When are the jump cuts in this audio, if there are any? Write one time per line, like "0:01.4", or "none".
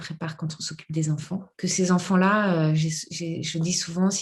0:01.5